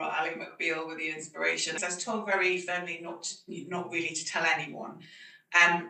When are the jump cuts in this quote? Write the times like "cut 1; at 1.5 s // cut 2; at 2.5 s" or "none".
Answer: cut 1; at 1.8 s